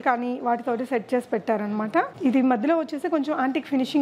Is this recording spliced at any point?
no; 0 cuts

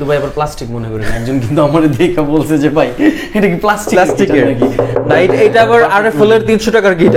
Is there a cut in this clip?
no; 0 cuts

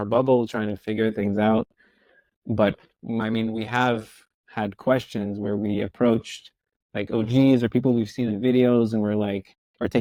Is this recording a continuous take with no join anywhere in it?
yes; 0 cuts

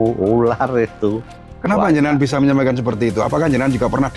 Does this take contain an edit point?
no; 0 cuts

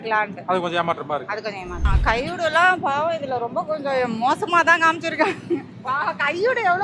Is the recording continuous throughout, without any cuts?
no; 2 cuts; at 1.7 s, 5.7 s

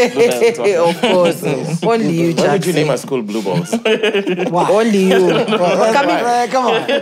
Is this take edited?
no; 0 cuts

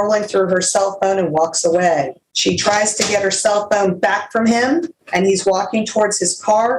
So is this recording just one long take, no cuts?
no; 2 cuts; at 2.2 s, 5.0 s

